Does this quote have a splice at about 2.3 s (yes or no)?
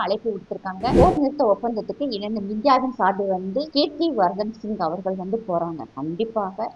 no